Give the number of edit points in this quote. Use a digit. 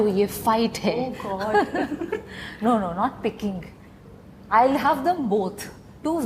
0